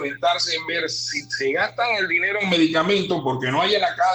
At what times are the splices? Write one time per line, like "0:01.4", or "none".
none